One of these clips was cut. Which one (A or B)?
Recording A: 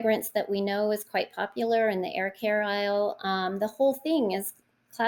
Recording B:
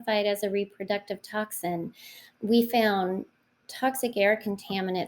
B